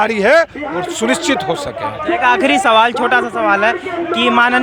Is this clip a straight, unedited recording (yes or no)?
yes